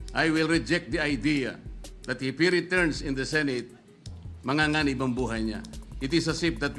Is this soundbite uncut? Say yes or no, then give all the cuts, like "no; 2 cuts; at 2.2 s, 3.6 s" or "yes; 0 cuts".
yes; 0 cuts